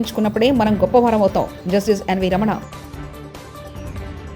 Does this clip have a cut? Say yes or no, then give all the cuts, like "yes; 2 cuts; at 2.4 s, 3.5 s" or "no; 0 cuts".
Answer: no; 0 cuts